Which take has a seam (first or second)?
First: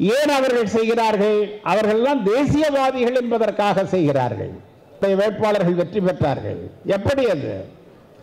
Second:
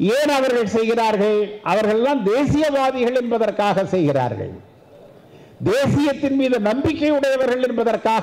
first